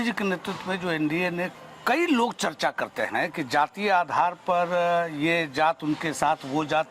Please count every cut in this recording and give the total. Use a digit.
1